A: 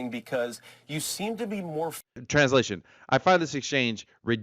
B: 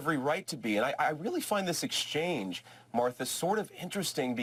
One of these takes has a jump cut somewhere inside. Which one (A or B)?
A